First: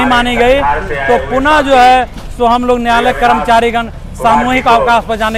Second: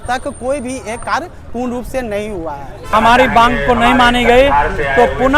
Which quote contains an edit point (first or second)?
second